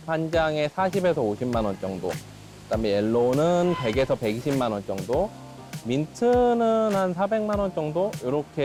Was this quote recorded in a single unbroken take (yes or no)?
yes